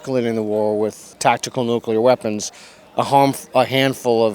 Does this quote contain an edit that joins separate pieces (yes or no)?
yes